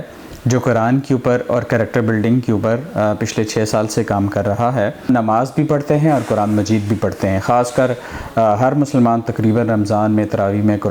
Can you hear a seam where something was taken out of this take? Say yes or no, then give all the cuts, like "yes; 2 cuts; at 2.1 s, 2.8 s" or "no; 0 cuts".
yes; 1 cut; at 5.1 s